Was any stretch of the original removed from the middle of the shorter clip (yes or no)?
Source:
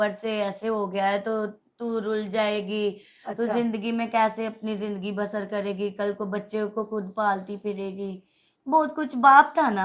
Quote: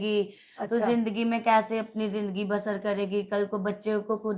no